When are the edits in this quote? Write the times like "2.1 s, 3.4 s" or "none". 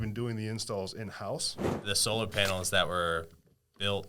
1.7 s